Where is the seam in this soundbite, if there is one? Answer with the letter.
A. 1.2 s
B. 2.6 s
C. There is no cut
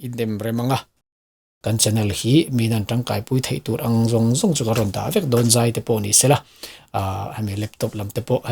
A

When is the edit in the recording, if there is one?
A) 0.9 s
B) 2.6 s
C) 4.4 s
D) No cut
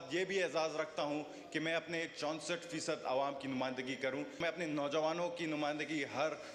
C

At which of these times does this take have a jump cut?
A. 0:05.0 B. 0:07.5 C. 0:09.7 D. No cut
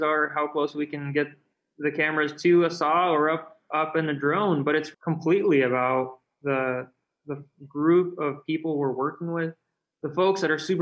D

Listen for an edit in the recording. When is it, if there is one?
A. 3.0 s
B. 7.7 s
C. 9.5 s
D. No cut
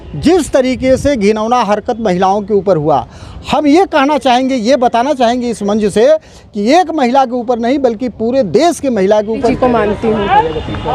C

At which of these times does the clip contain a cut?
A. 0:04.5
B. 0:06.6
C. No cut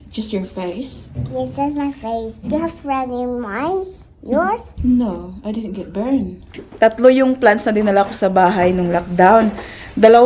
B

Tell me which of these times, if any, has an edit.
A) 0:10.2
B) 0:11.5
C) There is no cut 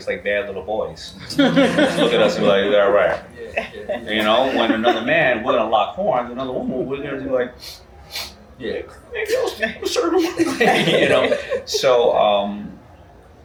C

